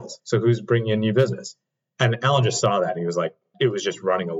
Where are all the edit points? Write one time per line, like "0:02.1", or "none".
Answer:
0:03.5